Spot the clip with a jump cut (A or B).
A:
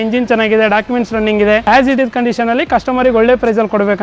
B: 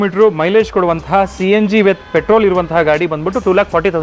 A